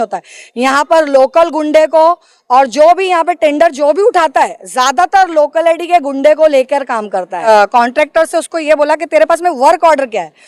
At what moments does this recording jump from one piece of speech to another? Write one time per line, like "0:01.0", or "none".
0:07.5